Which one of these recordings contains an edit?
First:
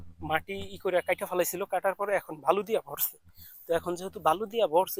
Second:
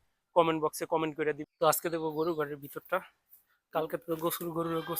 second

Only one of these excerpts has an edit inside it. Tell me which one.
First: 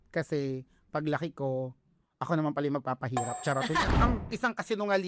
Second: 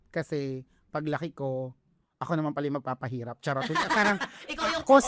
first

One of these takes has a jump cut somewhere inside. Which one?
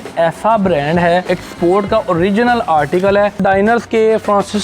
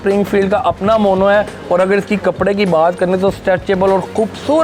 first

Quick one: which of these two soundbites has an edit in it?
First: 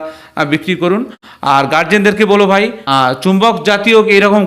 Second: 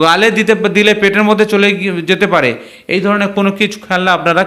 first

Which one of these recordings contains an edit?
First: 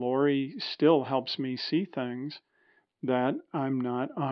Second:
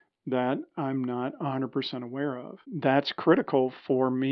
second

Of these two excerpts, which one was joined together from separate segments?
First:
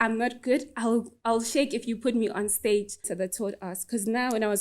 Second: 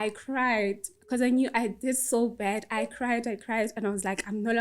first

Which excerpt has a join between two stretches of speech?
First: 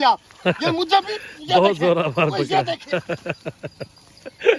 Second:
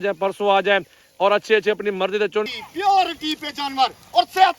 second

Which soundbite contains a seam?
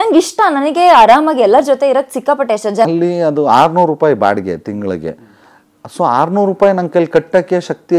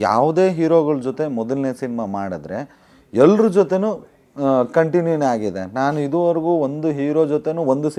first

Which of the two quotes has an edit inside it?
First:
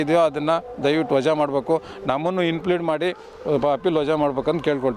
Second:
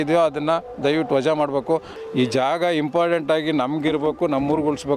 second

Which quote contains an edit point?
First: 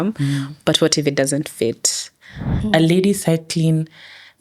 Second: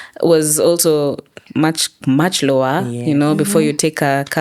first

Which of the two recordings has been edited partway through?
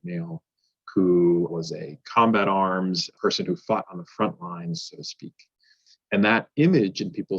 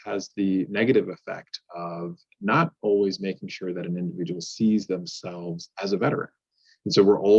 first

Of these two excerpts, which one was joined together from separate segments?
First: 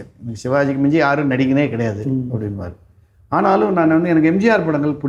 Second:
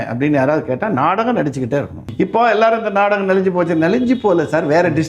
second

